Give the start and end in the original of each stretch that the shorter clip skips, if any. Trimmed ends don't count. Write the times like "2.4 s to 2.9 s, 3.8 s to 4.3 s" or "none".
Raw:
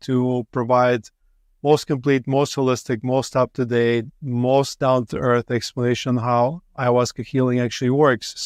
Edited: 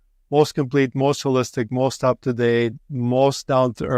none